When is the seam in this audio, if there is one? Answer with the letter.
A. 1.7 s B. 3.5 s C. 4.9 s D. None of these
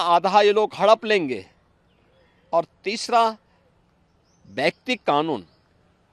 D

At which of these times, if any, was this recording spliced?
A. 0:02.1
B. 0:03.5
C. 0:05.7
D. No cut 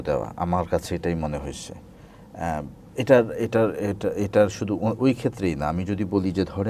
D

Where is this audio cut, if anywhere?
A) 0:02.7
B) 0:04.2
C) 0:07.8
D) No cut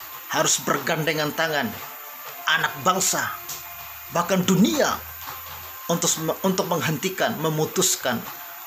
D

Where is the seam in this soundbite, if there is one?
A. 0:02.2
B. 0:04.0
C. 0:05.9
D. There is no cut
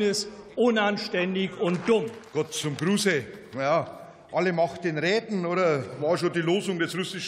A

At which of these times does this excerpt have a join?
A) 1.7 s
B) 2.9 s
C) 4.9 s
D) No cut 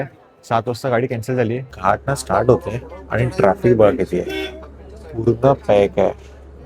A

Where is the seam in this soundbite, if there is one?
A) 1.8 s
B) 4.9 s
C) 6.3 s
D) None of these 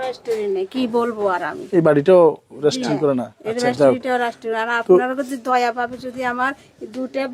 D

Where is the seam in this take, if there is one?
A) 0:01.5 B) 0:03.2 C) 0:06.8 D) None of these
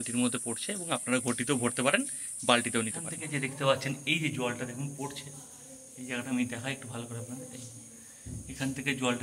B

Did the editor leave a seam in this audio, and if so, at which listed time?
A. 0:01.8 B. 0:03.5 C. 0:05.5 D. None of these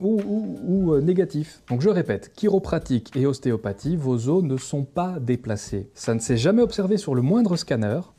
A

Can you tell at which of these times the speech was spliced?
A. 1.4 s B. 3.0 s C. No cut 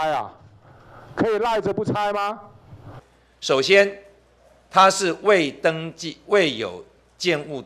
B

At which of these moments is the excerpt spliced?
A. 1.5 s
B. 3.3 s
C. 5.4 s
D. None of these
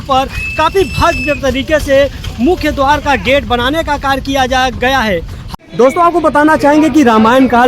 C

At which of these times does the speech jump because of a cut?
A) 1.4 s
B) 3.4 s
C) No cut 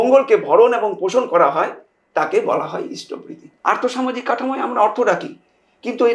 B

